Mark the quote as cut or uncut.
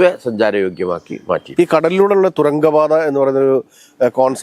uncut